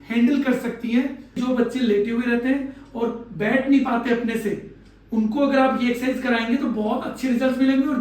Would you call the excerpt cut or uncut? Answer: cut